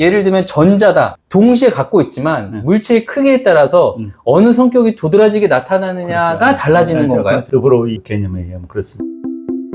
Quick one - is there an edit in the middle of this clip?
yes; 3 cuts; at 1.2 s, 7.4 s, 8.9 s

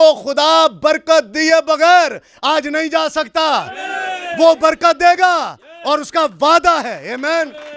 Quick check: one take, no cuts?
yes; 0 cuts

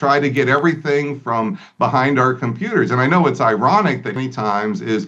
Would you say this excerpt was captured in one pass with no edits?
no; 1 cut; at 4.2 s

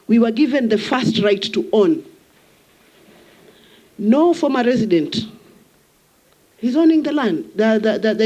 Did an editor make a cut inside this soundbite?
no; 0 cuts

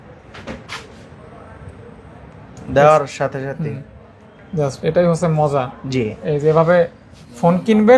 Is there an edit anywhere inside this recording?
no; 0 cuts

